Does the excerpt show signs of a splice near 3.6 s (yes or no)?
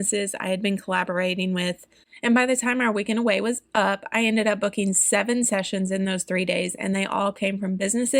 no